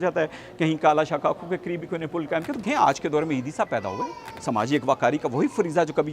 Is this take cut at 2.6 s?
yes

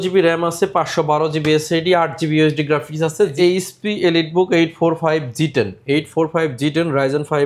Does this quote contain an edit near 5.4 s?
no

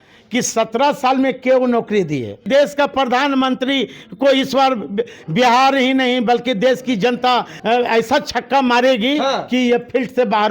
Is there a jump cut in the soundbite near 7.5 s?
yes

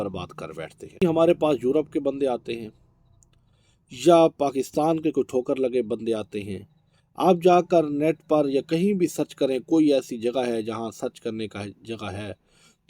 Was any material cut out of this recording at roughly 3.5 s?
no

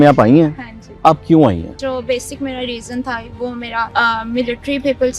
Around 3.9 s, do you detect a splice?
yes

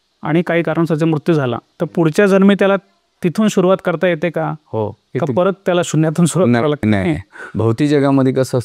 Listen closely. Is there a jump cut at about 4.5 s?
no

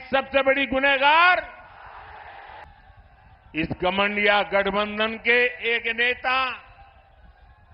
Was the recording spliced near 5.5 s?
no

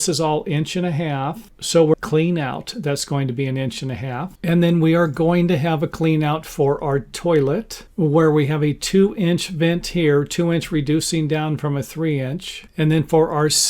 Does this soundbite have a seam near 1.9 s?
yes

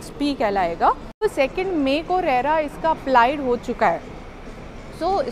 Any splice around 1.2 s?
yes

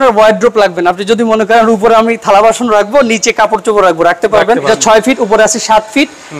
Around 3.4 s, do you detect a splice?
no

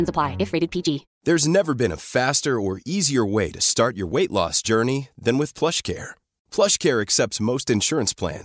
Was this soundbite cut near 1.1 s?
yes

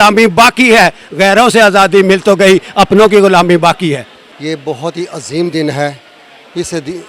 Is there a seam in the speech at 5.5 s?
no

